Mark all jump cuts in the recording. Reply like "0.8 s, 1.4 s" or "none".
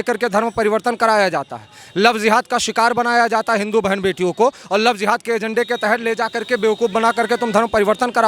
none

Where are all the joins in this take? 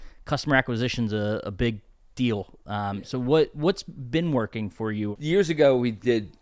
5.1 s

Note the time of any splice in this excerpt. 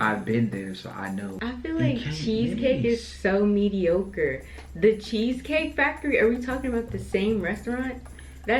1.3 s

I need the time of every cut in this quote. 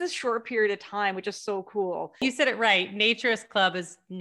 2.2 s

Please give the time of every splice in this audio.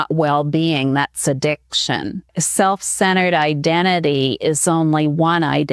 2.4 s

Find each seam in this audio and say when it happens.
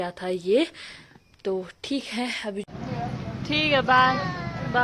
2.6 s

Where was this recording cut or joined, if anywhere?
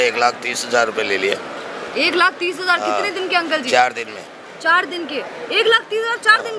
none

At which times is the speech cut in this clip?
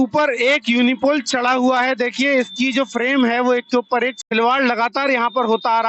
4.2 s

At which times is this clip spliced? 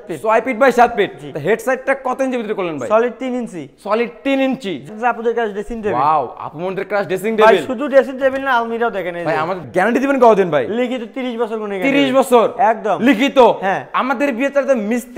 4.9 s, 9.6 s

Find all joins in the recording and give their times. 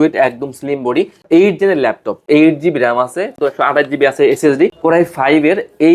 1.2 s, 2.3 s, 3.3 s, 4.8 s

